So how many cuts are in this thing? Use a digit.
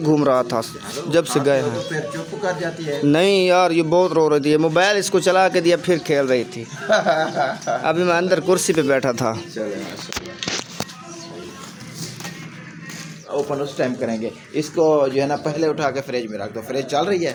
0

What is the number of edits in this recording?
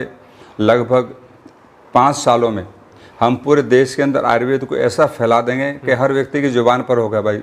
0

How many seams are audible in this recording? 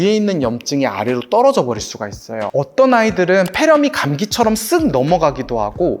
1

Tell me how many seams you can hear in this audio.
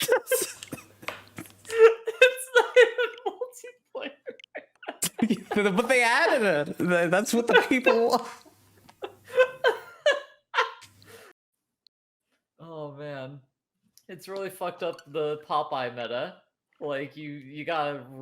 1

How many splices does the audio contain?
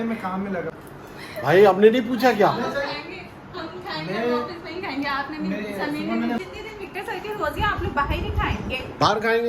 2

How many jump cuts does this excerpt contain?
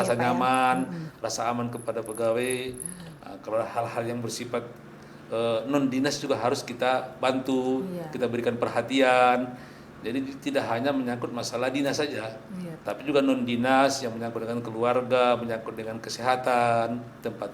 0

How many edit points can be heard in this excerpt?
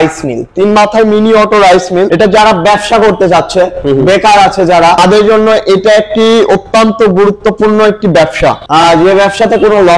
3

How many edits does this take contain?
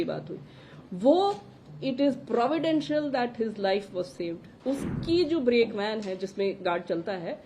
1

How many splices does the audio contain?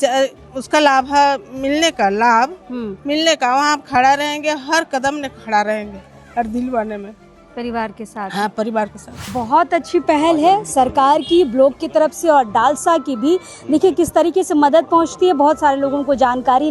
1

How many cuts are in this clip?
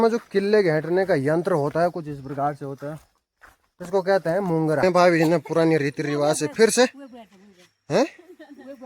1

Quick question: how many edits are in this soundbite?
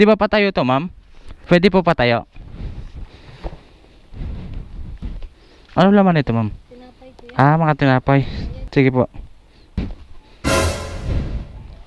2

